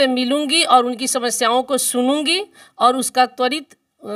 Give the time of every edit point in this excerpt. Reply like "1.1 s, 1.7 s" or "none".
none